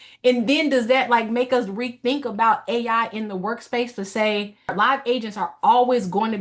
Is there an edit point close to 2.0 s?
no; 1 cut; at 4.7 s

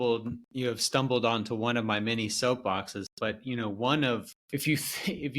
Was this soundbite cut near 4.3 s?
yes; 1 cut; at 4.3 s

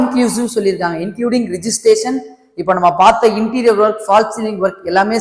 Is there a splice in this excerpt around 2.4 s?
no; 0 cuts

